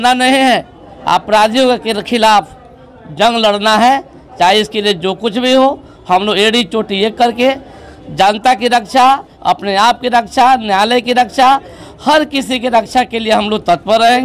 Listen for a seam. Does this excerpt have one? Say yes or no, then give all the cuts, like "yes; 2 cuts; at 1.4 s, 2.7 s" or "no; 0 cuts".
no; 0 cuts